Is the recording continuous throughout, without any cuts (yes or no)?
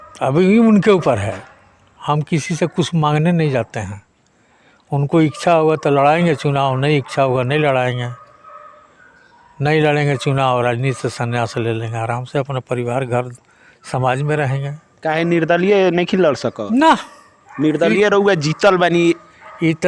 yes